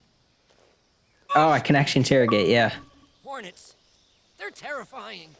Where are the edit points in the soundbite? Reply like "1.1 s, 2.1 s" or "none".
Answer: none